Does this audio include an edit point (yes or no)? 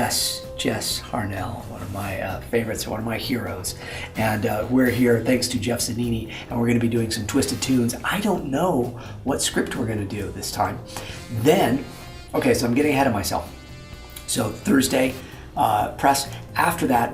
yes